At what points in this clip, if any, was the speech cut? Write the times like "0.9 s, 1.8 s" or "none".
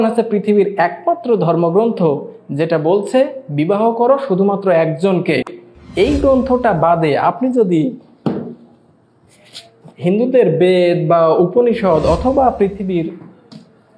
none